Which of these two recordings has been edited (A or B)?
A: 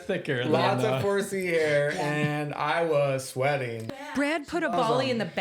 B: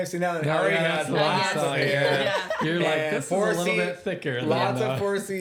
A